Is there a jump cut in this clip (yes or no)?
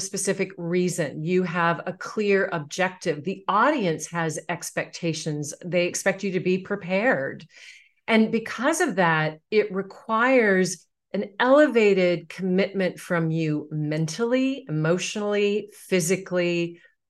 no